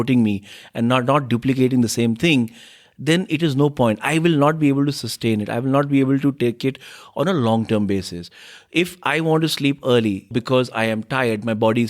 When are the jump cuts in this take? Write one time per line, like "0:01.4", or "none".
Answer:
0:10.4